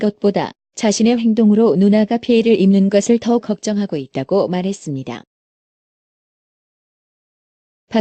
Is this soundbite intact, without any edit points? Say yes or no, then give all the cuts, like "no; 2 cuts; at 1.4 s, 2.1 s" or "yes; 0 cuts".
no; 1 cut; at 3.7 s